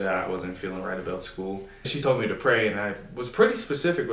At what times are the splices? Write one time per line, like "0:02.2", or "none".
0:02.0